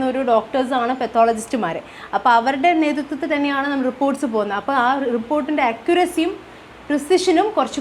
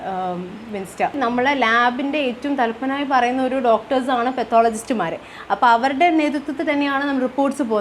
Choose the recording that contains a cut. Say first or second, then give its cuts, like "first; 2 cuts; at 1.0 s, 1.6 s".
second; 1 cut; at 1.1 s